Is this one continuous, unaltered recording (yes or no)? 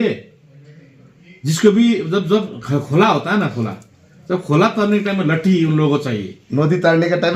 yes